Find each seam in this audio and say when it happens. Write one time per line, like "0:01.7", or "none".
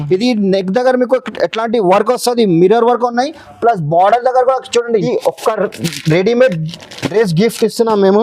0:05.1